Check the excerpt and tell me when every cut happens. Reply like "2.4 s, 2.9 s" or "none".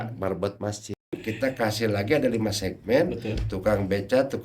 1.2 s